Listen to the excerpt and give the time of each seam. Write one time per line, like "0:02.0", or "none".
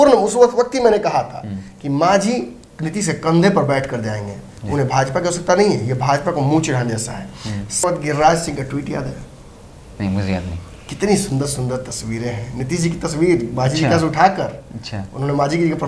0:07.8